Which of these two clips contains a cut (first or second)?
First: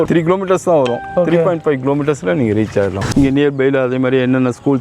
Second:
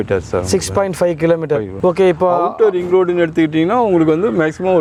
first